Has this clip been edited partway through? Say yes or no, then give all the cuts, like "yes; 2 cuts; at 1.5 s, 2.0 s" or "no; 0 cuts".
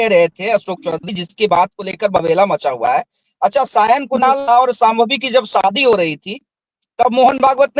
no; 0 cuts